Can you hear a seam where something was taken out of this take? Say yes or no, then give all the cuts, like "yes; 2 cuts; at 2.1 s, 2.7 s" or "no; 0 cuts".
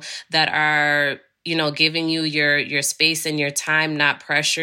no; 0 cuts